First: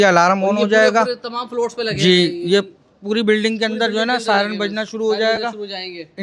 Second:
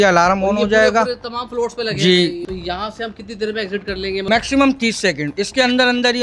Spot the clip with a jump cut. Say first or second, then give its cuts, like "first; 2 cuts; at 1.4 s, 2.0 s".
second; 2 cuts; at 2.4 s, 4.2 s